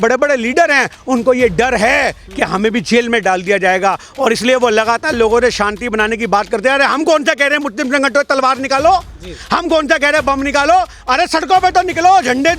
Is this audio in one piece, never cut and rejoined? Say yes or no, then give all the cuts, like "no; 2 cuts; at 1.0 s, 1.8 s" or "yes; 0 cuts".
yes; 0 cuts